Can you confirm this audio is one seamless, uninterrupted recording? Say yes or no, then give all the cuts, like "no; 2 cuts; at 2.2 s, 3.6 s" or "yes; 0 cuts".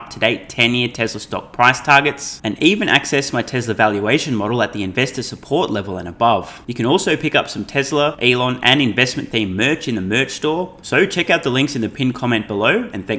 no; 3 cuts; at 6.6 s, 8.2 s, 10.8 s